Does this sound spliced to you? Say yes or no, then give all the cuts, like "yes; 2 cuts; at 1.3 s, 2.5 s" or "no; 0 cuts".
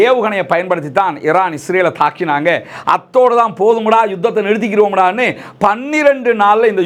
no; 0 cuts